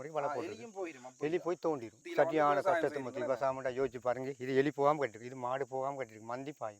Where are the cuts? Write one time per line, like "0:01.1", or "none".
0:02.0